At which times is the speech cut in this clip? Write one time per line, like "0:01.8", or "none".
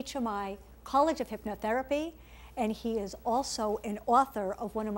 0:03.3